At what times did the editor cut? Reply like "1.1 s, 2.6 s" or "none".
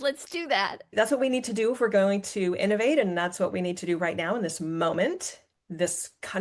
0.9 s